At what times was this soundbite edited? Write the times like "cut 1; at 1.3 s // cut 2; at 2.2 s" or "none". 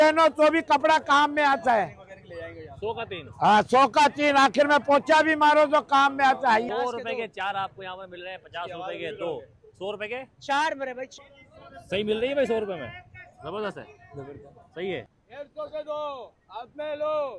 cut 1; at 6.7 s // cut 2; at 11.1 s // cut 3; at 15.2 s